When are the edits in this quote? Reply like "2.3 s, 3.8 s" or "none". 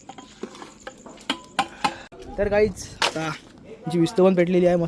2.0 s

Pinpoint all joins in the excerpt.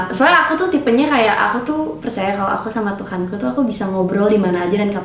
none

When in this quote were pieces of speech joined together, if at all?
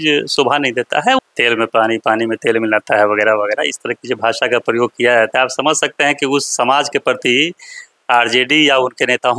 1.2 s

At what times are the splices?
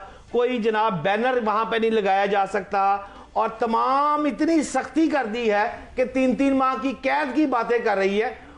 none

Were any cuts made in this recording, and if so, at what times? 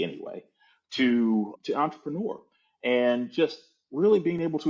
1.5 s

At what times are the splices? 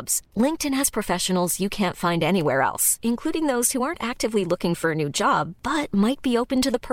none

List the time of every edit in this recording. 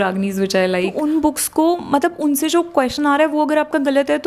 1.0 s

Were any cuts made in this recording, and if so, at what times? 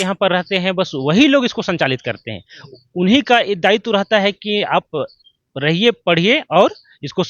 none

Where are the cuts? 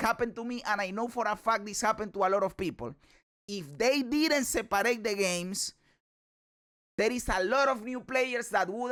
none

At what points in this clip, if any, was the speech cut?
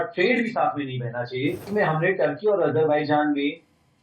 1.7 s

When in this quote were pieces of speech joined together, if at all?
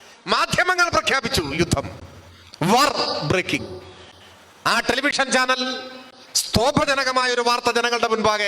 none

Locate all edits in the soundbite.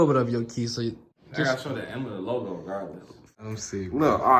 1.1 s, 3.5 s

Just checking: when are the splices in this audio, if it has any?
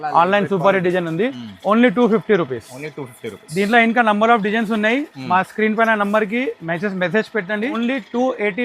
7.8 s

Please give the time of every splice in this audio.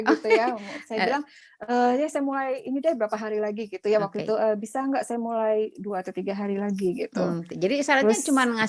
none

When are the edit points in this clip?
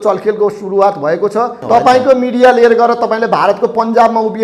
1.6 s

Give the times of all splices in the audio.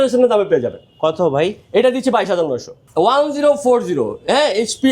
2.8 s

